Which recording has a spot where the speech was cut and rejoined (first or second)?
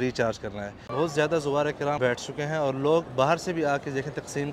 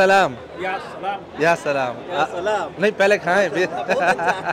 first